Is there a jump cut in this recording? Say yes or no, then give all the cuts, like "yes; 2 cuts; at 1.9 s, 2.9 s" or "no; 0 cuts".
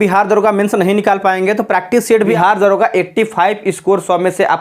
yes; 1 cut; at 2.2 s